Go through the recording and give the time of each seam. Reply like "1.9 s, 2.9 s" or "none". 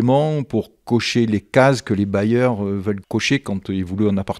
3.0 s

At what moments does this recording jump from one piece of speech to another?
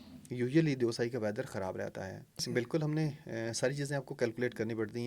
2.4 s

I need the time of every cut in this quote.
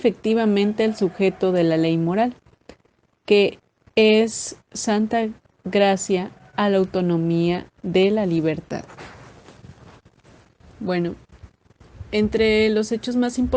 7.3 s

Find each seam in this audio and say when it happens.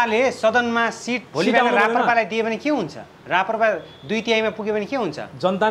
1.2 s

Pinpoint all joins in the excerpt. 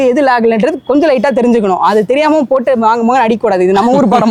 none

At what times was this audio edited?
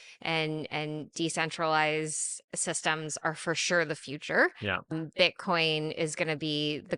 4.9 s

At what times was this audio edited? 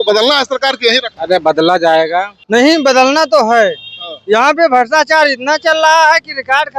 1.1 s, 2.4 s

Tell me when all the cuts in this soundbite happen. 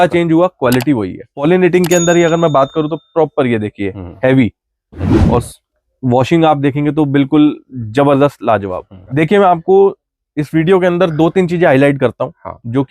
1.4 s, 9.0 s

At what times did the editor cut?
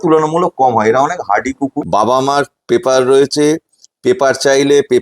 1.8 s

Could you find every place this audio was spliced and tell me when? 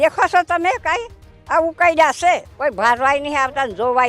2.5 s

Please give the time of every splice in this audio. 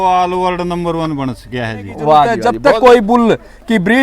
2.5 s

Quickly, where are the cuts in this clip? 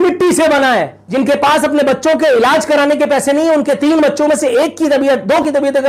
1.0 s

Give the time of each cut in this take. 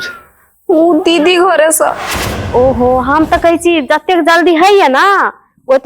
2.3 s

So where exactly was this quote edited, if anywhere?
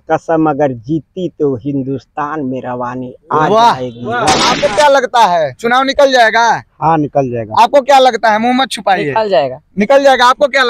4.5 s

